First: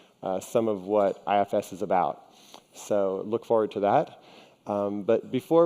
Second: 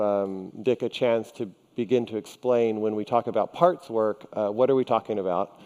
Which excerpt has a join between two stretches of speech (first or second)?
first